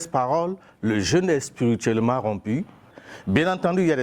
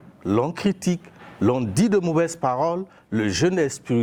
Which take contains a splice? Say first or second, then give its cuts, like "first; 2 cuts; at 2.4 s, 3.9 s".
first; 1 cut; at 2.9 s